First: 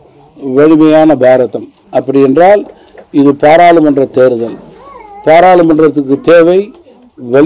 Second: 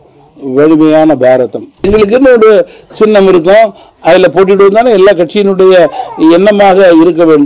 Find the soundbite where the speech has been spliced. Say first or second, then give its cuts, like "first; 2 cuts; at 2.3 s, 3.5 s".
second; 1 cut; at 1.9 s